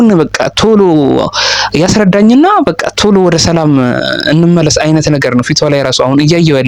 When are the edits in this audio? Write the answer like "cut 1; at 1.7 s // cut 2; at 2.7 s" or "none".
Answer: none